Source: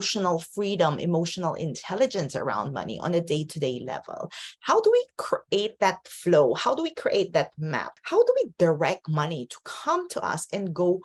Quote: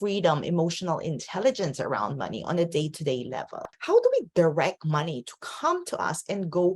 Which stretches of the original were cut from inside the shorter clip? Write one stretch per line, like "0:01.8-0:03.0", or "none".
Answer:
0:04.2-0:07.9